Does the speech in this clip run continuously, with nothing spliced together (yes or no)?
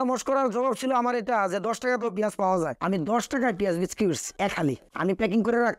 yes